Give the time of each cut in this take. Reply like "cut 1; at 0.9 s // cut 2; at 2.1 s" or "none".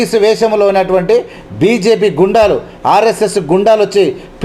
none